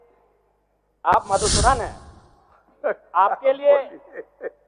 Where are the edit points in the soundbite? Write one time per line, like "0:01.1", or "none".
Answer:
none